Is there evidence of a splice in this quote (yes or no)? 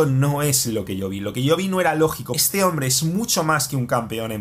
yes